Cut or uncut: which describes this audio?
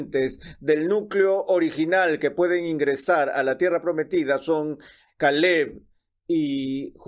cut